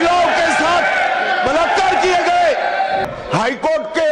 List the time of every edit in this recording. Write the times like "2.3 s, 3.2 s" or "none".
3.0 s